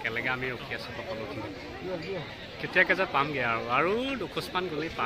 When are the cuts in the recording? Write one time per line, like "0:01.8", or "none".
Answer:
none